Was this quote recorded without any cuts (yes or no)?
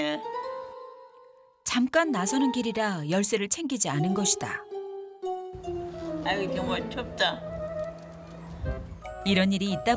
no